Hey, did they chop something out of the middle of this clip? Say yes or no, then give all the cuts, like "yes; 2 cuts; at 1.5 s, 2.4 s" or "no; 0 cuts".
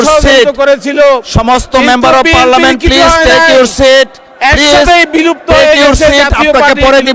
no; 0 cuts